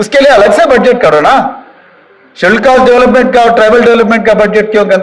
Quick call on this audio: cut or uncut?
uncut